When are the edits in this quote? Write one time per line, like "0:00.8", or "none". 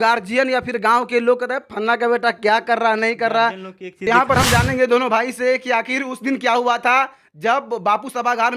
0:04.1